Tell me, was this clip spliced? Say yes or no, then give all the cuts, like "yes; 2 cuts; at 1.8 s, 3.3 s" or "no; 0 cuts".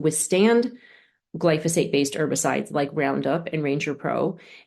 no; 0 cuts